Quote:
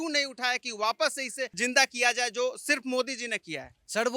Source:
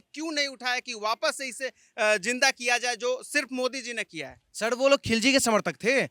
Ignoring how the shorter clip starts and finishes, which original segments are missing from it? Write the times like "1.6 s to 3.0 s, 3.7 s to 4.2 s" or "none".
1.8 s to 2.2 s